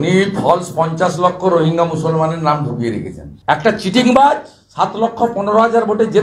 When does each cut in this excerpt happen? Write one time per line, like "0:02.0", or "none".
0:03.3